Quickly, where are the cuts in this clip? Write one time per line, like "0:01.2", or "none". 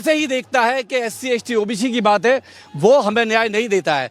none